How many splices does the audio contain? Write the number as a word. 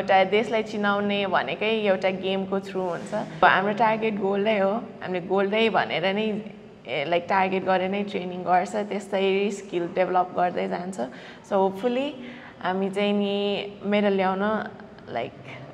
one